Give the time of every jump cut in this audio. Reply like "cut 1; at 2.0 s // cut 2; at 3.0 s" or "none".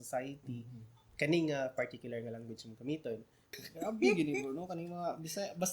cut 1; at 3.7 s